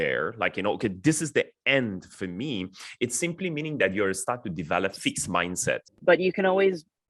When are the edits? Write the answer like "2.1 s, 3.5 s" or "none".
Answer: 5.9 s